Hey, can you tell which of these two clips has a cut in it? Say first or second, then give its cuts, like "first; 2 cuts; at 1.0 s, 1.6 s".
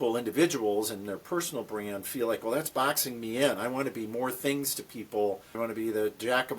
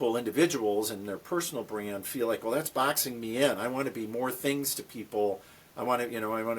first; 1 cut; at 5.6 s